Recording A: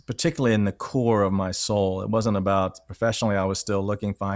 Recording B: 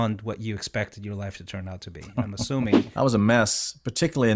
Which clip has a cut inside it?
B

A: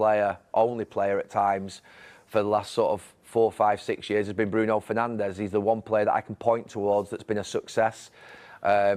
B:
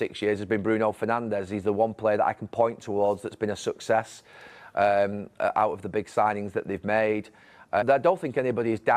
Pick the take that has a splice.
B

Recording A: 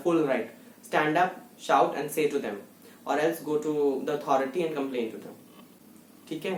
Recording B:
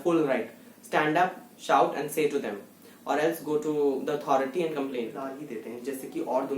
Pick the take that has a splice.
B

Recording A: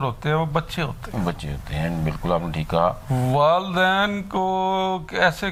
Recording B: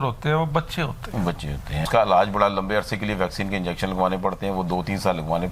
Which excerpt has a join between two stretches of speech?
B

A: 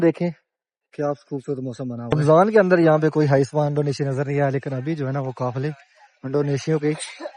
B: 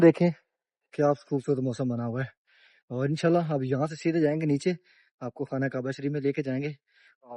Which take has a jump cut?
A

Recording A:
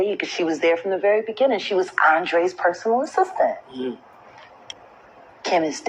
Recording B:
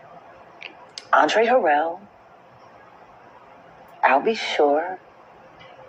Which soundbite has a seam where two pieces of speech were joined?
A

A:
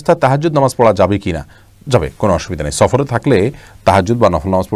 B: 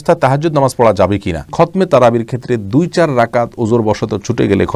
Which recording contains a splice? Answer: B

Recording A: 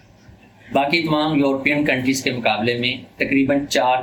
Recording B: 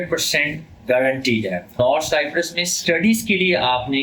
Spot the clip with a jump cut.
B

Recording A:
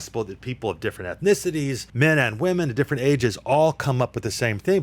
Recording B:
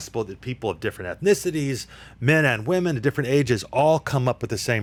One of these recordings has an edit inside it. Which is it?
A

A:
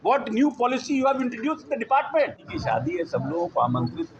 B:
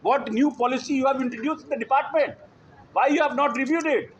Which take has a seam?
A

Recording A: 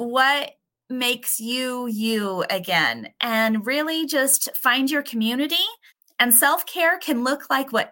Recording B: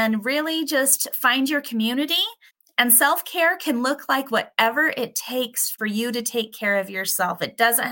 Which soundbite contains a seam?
B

